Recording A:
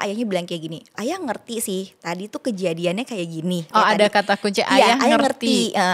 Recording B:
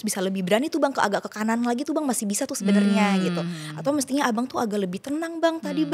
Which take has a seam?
A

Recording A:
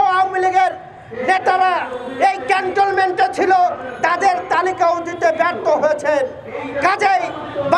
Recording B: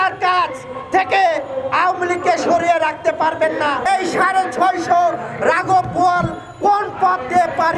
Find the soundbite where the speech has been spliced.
B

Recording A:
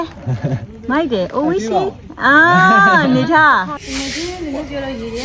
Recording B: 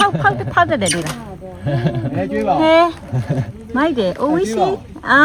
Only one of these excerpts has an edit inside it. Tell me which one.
A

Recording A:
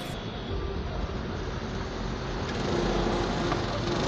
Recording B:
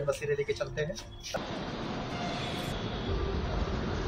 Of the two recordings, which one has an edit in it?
B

